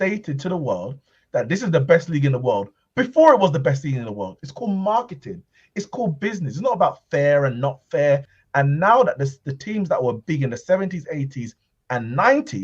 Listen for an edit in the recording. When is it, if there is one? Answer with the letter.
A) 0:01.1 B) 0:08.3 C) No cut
B